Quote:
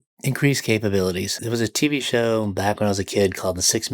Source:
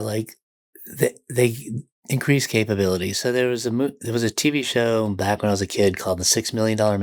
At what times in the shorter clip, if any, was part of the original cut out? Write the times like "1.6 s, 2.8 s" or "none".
1.3 s